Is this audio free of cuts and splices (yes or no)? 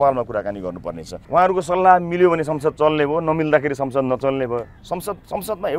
no